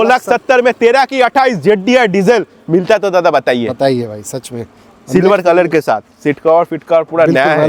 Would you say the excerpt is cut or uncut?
uncut